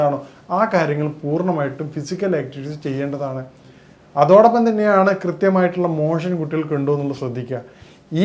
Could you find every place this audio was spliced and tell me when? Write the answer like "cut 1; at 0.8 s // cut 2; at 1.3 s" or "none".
none